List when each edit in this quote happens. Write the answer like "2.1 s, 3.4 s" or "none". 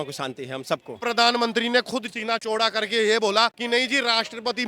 1.0 s, 2.3 s